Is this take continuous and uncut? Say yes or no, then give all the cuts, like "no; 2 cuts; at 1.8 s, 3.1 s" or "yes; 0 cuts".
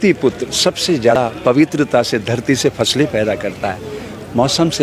no; 1 cut; at 1.1 s